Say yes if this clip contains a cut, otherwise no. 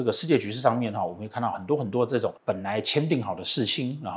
yes